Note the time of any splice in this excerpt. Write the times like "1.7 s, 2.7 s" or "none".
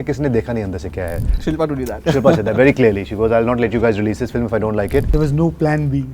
1.3 s, 5.1 s